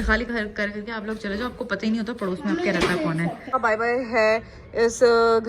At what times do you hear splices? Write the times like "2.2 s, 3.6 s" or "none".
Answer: 3.5 s